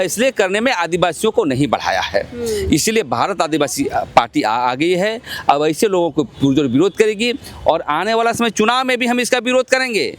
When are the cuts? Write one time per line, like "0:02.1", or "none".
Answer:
none